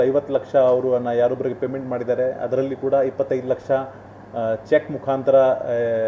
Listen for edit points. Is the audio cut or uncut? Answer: uncut